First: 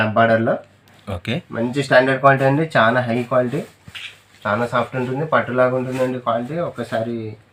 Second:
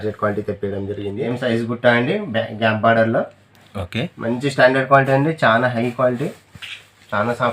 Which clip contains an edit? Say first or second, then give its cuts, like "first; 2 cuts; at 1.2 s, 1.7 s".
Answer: second; 1 cut; at 1.3 s